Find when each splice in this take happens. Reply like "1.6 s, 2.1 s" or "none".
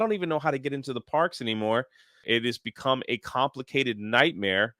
2.2 s